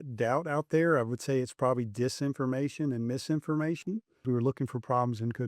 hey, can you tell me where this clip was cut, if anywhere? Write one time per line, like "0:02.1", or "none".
0:04.2